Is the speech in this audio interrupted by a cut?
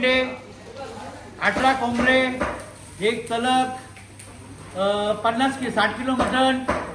no; 0 cuts

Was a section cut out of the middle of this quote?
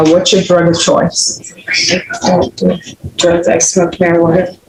no; 0 cuts

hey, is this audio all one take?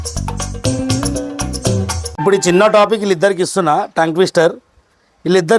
no; 1 cut; at 2.0 s

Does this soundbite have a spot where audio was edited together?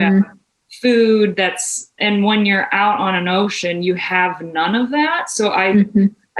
yes; 1 cut; at 2.0 s

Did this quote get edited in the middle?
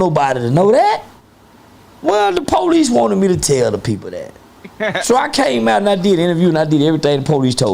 no; 0 cuts

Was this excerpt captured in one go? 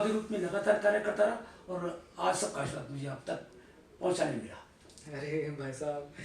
yes; 0 cuts

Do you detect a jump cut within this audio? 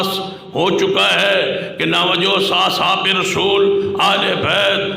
no; 0 cuts

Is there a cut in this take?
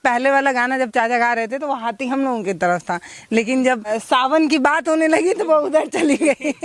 yes; 1 cut; at 4.0 s

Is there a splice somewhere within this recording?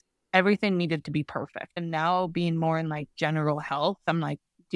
yes; 2 cuts; at 1.7 s, 4.0 s

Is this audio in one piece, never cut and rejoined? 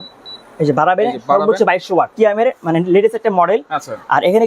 no; 1 cut; at 2.1 s

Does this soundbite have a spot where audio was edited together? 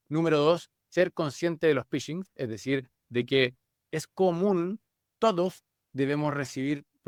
no; 0 cuts

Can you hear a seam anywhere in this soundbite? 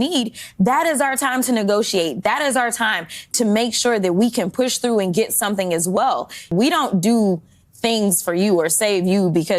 yes; 1 cut; at 6.5 s

